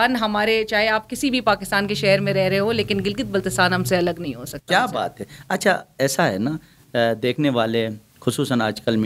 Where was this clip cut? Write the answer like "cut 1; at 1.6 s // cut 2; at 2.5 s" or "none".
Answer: none